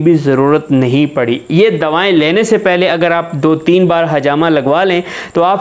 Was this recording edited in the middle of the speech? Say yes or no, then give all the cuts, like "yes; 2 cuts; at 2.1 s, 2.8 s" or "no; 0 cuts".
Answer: no; 0 cuts